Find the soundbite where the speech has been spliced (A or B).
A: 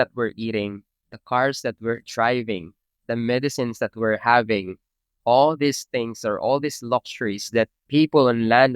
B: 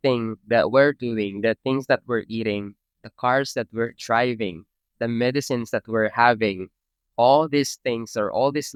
A